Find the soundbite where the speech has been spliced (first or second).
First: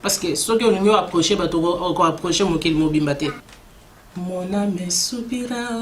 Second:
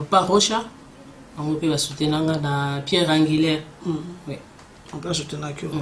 first